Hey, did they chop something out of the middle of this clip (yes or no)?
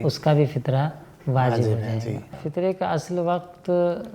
yes